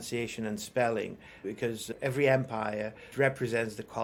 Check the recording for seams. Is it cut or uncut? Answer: uncut